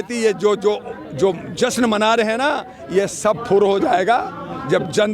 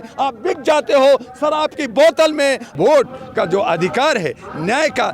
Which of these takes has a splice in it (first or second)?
second